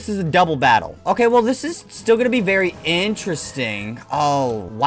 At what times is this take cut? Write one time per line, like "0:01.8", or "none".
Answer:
none